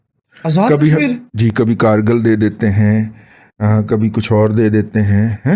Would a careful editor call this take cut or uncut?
uncut